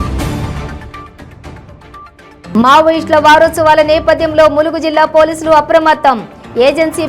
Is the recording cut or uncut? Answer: uncut